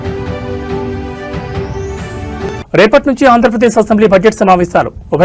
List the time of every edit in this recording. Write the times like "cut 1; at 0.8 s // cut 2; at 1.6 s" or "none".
cut 1; at 2.2 s